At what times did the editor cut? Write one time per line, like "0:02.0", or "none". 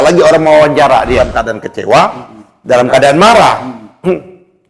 0:01.2